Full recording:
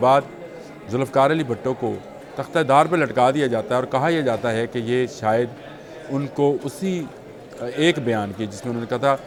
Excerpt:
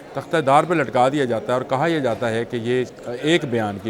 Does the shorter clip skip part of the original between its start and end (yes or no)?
yes